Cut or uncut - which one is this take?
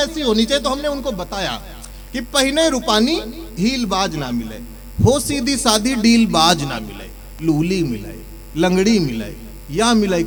uncut